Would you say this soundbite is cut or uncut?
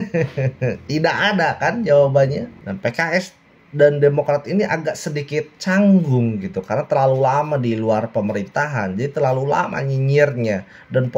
cut